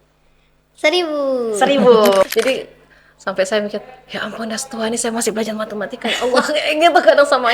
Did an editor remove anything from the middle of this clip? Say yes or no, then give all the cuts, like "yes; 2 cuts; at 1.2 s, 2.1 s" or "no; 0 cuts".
yes; 1 cut; at 2.2 s